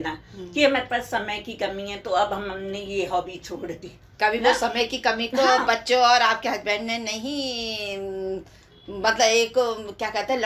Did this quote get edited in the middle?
no; 0 cuts

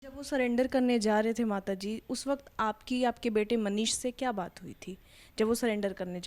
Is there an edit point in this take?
no; 0 cuts

